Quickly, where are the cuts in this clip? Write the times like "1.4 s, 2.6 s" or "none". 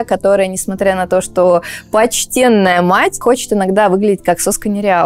none